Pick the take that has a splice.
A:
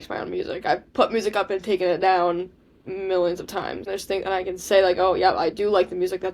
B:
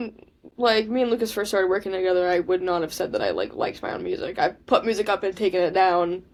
A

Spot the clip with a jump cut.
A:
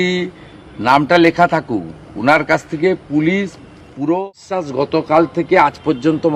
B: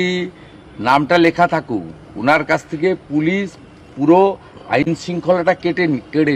A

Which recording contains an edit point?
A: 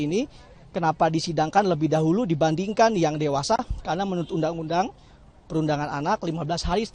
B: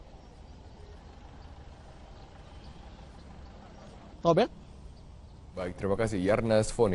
B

